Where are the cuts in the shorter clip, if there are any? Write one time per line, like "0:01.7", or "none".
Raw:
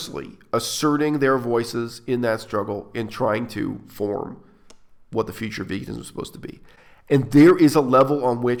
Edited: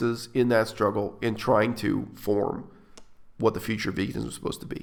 none